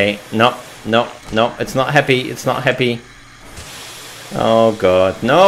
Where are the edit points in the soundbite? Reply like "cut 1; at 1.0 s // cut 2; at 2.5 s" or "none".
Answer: none